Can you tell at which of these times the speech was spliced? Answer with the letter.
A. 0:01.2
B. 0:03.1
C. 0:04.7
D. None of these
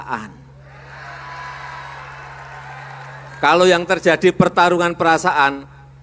B